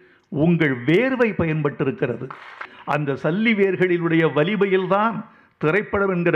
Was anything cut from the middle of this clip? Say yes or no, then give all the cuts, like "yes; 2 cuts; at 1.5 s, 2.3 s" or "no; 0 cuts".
yes; 1 cut; at 2.7 s